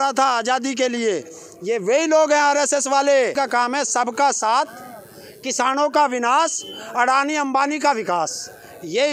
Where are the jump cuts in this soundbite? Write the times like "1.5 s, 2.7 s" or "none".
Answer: 3.3 s